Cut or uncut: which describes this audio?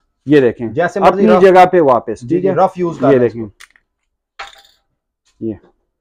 uncut